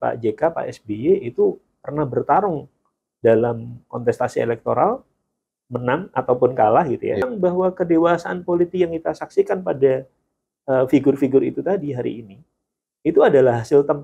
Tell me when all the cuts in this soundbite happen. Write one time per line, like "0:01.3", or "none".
0:07.2